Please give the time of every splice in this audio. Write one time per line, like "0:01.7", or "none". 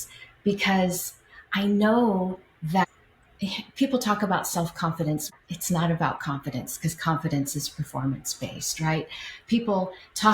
0:05.3

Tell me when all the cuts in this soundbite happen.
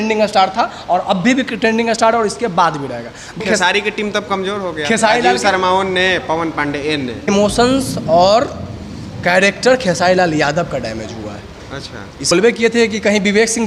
0:03.4
0:07.3
0:12.3

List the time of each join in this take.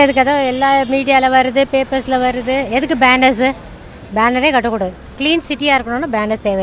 none

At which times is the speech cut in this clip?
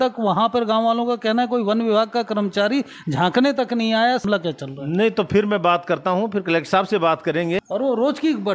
0:04.2
0:07.6

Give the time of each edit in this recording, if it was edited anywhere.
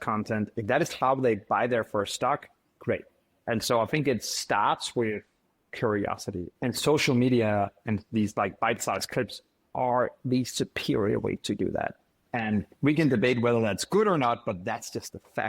0:03.3
0:06.5
0:12.7

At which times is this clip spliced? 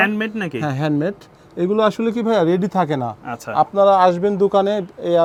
none

